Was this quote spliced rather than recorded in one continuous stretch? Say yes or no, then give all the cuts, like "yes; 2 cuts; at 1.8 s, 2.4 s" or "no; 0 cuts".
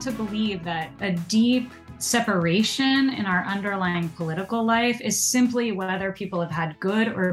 yes; 2 cuts; at 1.0 s, 1.9 s